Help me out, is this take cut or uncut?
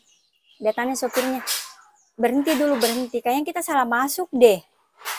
uncut